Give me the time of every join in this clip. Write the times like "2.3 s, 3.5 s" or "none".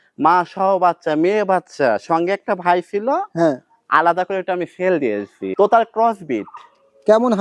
5.4 s